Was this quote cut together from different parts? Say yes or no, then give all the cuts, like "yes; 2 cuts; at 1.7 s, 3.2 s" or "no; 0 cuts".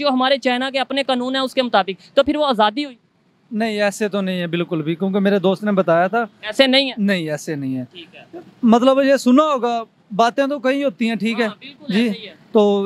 no; 0 cuts